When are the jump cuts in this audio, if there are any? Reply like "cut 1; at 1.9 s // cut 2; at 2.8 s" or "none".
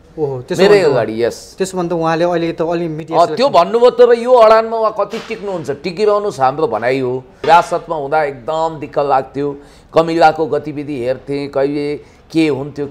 cut 1; at 7.4 s